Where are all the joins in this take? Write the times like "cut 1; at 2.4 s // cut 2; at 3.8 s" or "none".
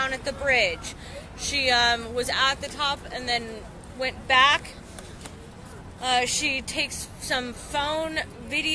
cut 1; at 1.2 s